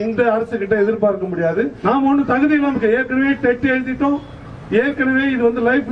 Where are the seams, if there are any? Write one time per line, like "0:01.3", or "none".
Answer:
0:01.8